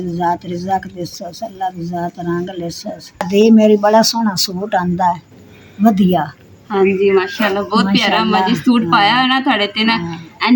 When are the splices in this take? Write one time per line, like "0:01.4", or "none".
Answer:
none